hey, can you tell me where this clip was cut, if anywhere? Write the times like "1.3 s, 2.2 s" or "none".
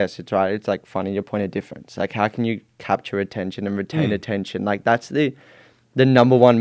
none

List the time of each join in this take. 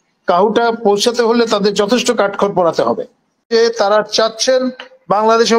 3.5 s

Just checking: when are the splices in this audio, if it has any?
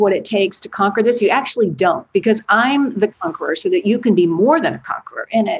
none

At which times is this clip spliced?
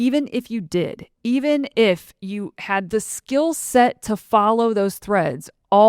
2.9 s

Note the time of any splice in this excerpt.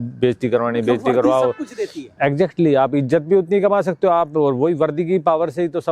none

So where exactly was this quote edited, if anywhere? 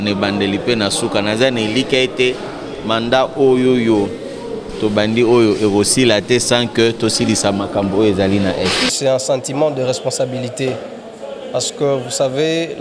8.9 s

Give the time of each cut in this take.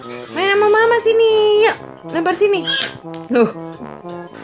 3.5 s

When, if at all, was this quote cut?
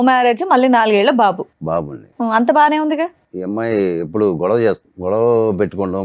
3.3 s, 4.9 s

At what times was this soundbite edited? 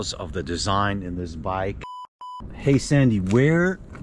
1.9 s

